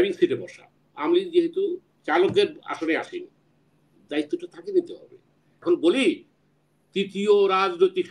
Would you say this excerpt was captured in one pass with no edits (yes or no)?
no